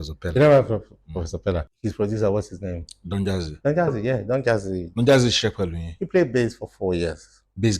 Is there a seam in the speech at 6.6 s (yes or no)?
no